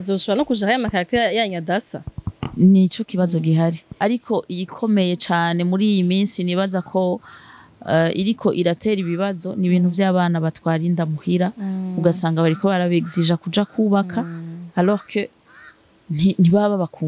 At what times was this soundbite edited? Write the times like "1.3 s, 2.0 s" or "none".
3.9 s